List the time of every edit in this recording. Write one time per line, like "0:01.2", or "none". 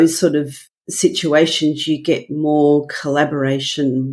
none